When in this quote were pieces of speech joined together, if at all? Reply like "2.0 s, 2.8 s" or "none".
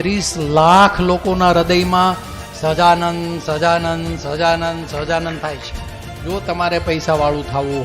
6.3 s